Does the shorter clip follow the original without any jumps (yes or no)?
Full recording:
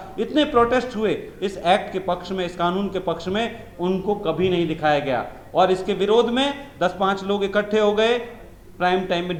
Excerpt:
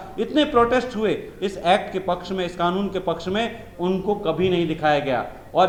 yes